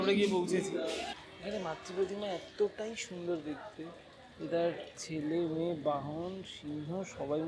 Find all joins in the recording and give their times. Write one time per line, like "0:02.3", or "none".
0:01.1